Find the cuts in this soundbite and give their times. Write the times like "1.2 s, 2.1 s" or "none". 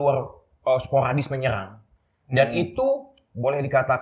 none